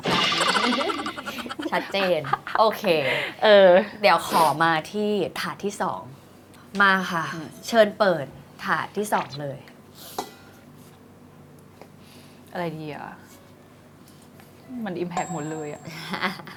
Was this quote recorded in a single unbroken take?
yes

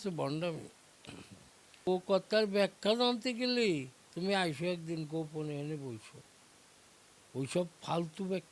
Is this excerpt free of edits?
no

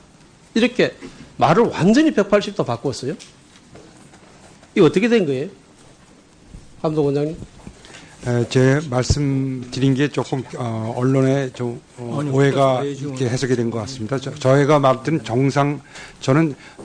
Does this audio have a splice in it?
no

